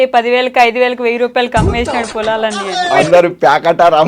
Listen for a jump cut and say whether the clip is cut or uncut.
cut